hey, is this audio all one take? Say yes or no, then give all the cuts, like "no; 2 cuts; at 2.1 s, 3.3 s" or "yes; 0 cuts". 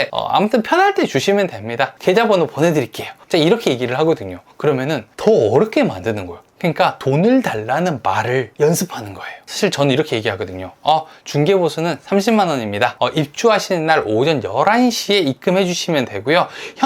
no; 2 cuts; at 1.9 s, 6.4 s